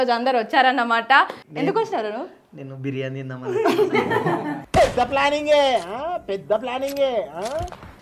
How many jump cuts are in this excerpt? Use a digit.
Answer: 1